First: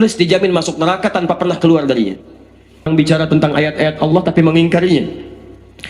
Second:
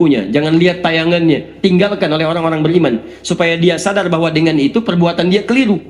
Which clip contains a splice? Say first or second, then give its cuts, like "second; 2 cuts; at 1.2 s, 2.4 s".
first; 1 cut; at 2.9 s